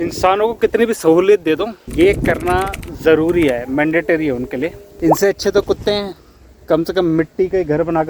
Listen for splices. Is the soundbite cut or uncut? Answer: cut